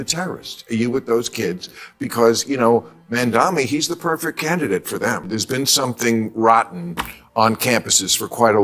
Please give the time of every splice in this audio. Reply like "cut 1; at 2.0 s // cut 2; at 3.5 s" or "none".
cut 1; at 5.3 s